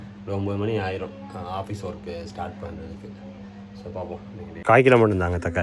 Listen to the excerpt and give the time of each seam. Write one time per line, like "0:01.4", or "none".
0:04.6